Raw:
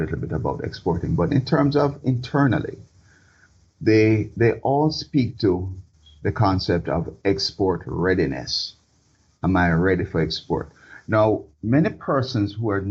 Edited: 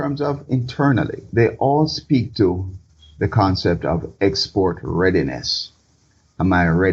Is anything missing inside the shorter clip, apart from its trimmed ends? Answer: yes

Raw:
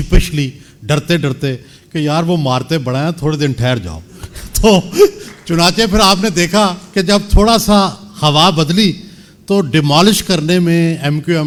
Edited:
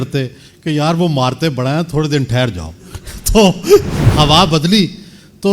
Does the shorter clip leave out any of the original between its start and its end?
yes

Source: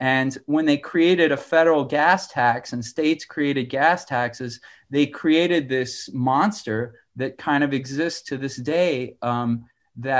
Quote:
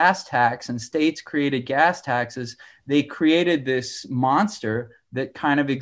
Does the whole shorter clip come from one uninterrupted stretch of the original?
yes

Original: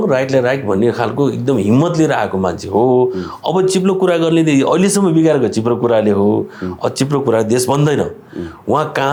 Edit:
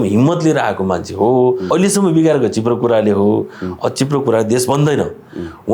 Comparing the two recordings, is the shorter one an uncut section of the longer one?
no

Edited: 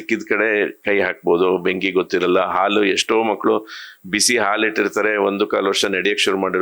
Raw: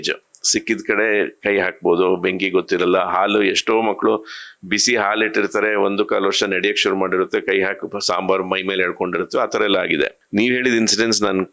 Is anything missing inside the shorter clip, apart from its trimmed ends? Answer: no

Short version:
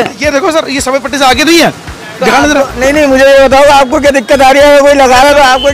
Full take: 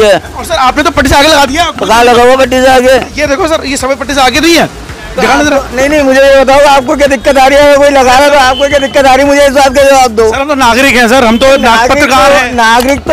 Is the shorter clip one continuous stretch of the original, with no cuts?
yes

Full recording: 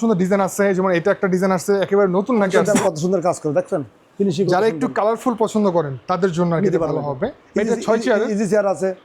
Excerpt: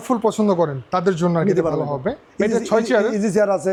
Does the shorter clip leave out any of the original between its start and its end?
no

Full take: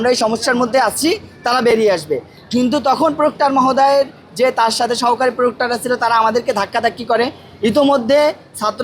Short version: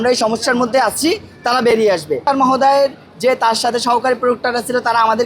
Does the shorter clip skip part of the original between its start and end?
yes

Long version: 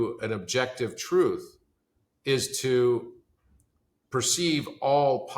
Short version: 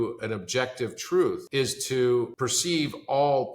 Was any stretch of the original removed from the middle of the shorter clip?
yes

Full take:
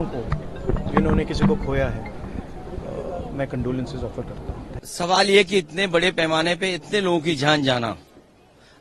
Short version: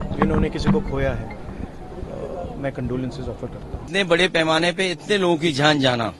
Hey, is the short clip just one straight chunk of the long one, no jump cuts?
no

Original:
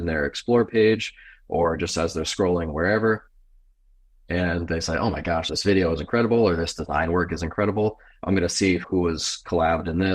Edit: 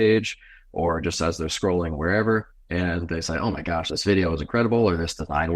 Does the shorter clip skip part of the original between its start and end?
yes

